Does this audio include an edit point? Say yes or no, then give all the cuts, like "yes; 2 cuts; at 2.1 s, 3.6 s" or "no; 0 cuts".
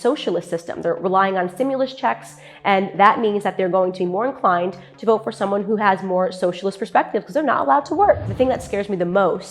yes; 1 cut; at 8.3 s